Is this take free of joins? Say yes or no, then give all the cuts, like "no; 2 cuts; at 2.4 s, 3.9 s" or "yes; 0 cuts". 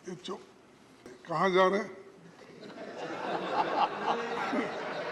no; 1 cut; at 1.1 s